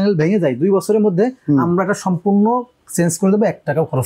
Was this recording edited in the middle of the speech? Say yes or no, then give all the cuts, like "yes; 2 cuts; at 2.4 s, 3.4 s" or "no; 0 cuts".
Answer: no; 0 cuts